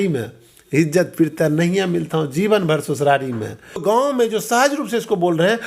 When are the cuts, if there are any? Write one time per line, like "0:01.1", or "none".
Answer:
0:03.8

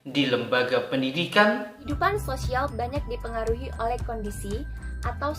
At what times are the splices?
0:01.8

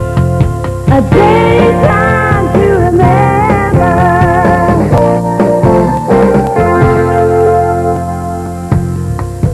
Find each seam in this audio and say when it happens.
0:06.9

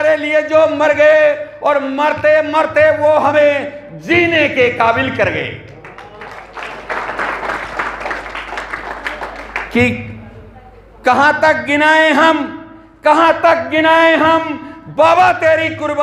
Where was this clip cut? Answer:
none

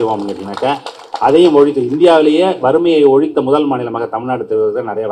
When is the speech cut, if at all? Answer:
none

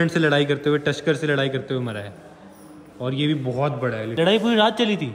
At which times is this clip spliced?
0:04.1

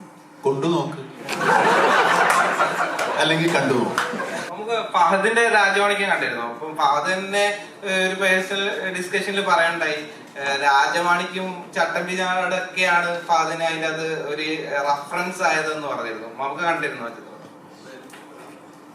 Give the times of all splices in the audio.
0:04.4

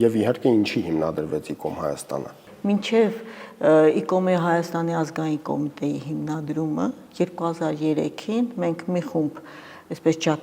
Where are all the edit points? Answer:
0:02.4

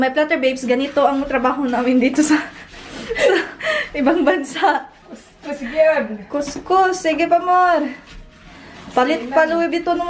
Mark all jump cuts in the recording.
none

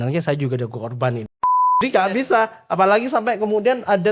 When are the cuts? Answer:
0:01.7

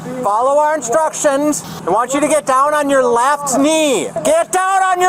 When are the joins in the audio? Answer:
0:01.7
0:04.2

